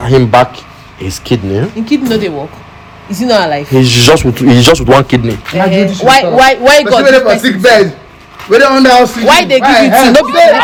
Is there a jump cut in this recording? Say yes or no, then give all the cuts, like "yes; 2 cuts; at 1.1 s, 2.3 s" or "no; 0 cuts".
no; 0 cuts